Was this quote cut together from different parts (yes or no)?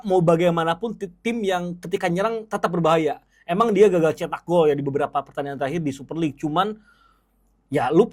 no